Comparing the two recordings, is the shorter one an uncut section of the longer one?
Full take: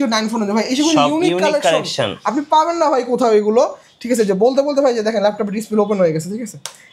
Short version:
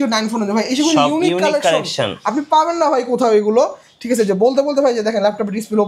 yes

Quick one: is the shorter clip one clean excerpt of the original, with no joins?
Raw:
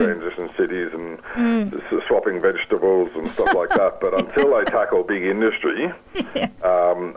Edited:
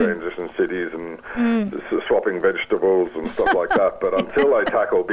yes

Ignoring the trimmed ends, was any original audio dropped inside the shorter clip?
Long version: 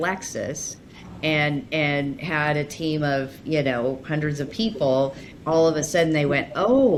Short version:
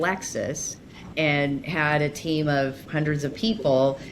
yes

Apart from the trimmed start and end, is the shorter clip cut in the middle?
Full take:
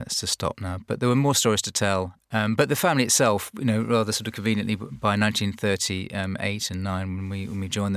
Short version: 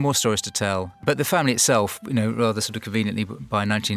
yes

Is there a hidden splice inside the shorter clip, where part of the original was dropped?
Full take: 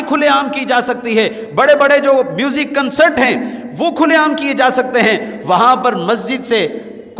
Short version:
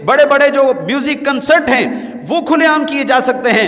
no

